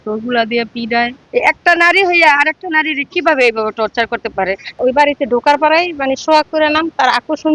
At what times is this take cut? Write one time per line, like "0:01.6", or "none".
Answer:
0:01.2
0:04.8